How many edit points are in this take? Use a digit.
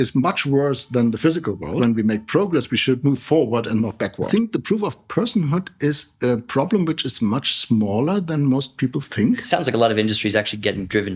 3